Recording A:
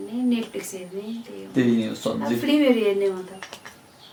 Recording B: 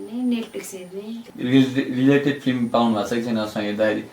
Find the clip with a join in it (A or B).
B